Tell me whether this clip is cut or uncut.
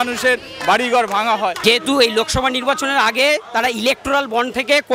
cut